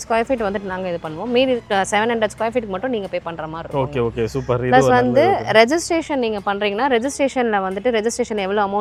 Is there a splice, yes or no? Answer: no